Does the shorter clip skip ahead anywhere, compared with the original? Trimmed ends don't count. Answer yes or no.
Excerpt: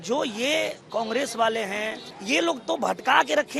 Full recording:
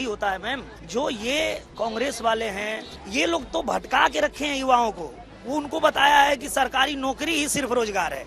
no